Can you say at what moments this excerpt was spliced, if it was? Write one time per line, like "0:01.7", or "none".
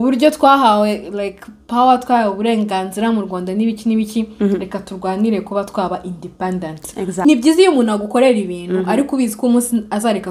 0:07.0